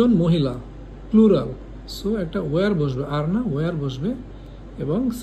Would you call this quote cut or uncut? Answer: uncut